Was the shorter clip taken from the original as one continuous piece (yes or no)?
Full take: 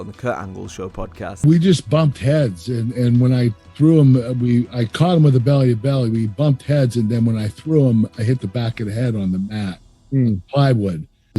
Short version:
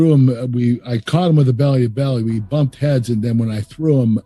yes